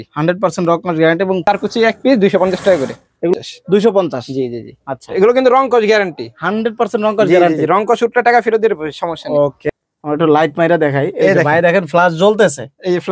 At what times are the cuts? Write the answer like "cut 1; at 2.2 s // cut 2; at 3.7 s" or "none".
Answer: cut 1; at 1.4 s // cut 2; at 9.6 s